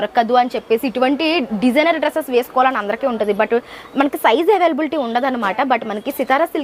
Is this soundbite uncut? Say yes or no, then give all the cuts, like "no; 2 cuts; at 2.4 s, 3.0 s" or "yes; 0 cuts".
yes; 0 cuts